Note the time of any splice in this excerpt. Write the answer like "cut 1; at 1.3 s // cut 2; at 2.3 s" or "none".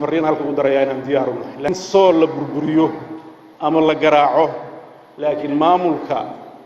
cut 1; at 1.7 s